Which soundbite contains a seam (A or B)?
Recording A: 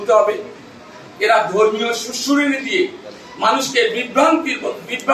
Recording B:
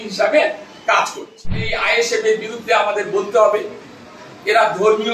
B